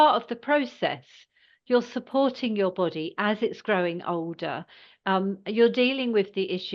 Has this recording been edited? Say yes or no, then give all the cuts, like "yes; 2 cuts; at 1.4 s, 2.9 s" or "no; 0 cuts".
no; 0 cuts